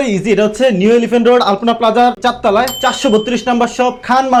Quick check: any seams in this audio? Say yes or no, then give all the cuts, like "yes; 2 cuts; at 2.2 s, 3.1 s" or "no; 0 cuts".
no; 0 cuts